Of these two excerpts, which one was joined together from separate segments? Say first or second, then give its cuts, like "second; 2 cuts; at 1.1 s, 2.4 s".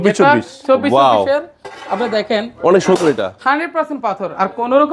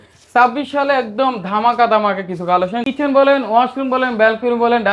second; 1 cut; at 2.8 s